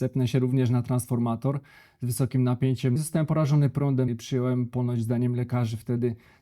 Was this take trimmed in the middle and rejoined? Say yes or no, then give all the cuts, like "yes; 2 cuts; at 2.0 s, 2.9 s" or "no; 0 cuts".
yes; 2 cuts; at 3.0 s, 4.1 s